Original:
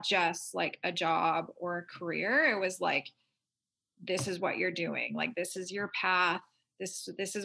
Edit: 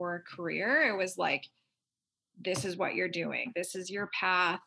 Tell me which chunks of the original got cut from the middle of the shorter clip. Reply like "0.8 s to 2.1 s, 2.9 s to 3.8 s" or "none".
5.1 s to 5.3 s